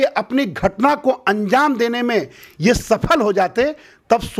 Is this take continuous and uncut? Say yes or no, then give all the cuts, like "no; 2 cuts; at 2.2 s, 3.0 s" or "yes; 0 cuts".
yes; 0 cuts